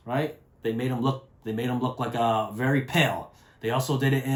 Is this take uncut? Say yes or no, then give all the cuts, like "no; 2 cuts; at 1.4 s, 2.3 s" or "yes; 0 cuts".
yes; 0 cuts